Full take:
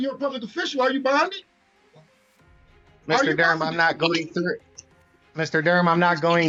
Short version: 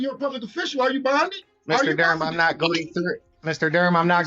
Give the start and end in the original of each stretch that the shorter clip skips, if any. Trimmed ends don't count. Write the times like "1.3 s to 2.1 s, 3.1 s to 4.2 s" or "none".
1.5 s to 2.9 s, 4.7 s to 5.2 s